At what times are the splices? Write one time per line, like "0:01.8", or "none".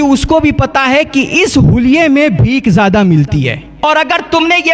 0:03.8